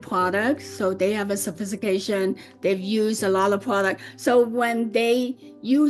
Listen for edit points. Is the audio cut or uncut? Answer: uncut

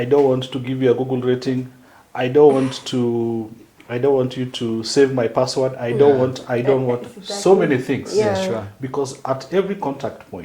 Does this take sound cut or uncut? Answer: uncut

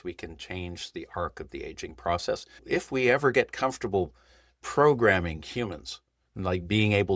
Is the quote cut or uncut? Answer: cut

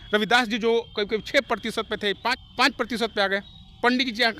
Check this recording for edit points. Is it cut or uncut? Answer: cut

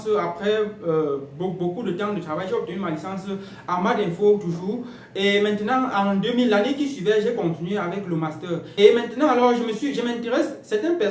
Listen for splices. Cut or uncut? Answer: cut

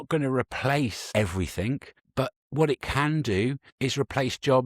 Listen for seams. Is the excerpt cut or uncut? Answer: cut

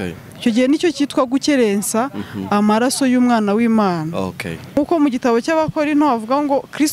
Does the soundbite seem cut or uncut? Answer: cut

